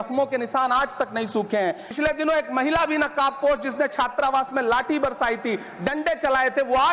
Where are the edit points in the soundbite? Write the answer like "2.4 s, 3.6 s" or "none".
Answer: 1.9 s